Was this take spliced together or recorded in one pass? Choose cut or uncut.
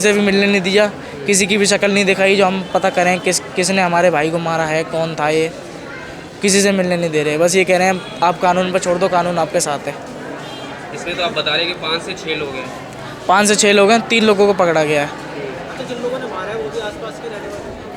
uncut